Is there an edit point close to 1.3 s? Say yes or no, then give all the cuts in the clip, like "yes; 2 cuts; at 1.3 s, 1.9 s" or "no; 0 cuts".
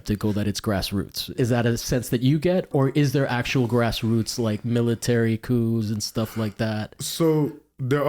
yes; 2 cuts; at 1.3 s, 2.7 s